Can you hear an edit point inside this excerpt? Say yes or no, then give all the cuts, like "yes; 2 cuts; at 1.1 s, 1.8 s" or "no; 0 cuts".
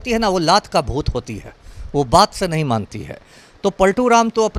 no; 0 cuts